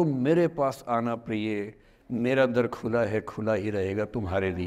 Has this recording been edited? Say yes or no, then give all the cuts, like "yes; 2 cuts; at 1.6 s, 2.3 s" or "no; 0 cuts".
no; 0 cuts